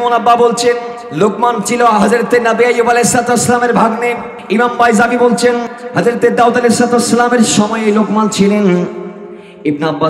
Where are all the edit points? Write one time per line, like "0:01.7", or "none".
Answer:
0:01.0
0:04.3
0:05.8